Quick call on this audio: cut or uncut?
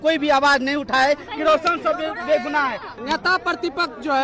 cut